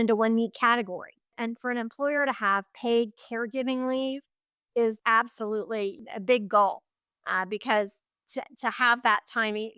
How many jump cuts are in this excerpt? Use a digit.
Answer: 3